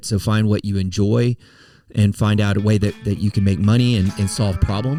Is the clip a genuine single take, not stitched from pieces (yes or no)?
yes